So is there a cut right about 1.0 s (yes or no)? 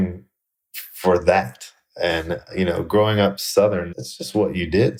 no